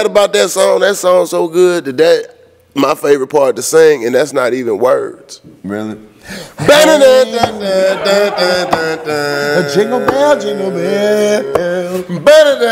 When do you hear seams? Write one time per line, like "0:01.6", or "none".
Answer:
none